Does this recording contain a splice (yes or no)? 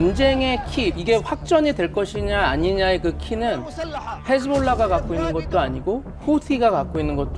no